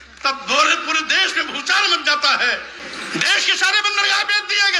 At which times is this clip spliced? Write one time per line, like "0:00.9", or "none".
0:02.8